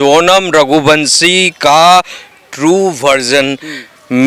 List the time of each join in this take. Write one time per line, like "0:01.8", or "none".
none